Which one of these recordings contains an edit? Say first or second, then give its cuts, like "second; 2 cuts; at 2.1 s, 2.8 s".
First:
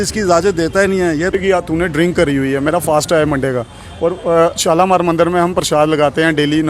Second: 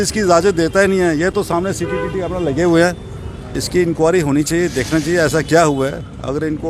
first; 1 cut; at 1.3 s